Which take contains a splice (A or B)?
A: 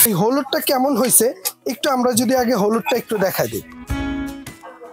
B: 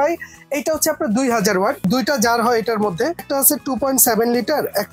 B